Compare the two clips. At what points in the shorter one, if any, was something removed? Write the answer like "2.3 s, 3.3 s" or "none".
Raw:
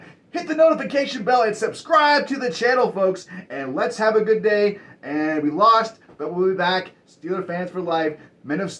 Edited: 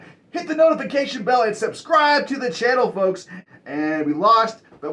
3.5 s